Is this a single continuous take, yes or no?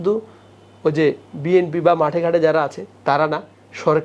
yes